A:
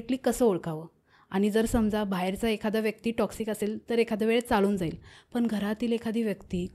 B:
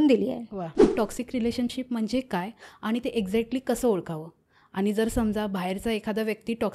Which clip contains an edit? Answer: B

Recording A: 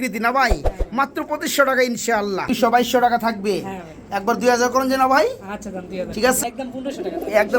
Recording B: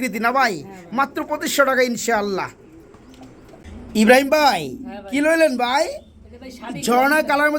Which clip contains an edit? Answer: A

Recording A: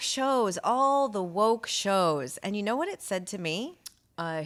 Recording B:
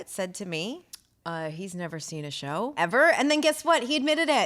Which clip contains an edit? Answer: B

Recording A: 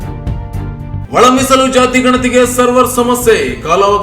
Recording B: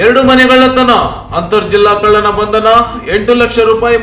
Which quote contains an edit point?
A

